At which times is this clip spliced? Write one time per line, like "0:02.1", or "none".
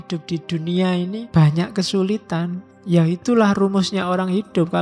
0:01.3
0:02.7